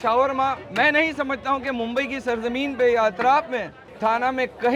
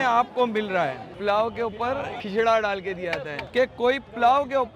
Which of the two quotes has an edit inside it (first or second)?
second